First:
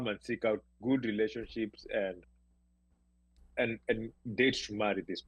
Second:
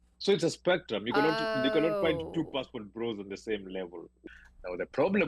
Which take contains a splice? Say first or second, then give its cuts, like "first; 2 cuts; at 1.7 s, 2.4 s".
second; 1 cut; at 4.1 s